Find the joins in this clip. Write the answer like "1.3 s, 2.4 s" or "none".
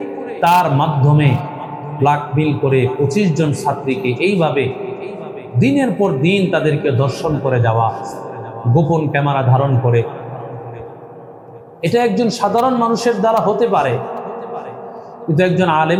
none